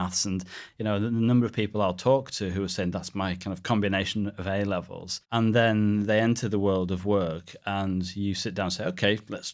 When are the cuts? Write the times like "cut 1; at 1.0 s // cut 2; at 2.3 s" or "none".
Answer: none